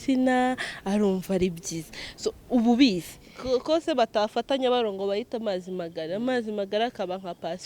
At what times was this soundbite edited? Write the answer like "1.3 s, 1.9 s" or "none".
3.1 s